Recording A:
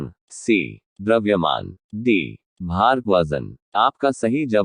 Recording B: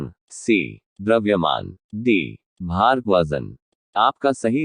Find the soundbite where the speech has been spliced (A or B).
B